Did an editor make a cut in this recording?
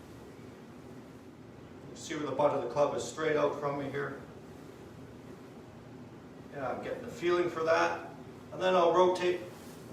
yes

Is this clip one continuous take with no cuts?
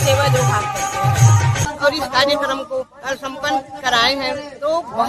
no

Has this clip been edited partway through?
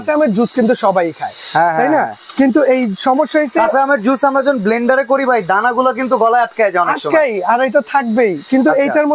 no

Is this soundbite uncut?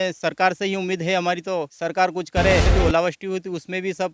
no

